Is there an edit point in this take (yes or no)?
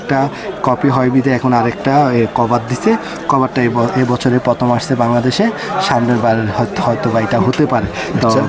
no